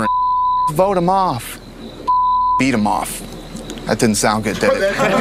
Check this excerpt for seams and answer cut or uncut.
uncut